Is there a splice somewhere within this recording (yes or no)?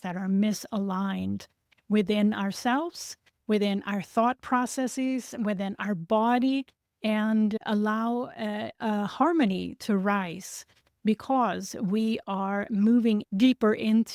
yes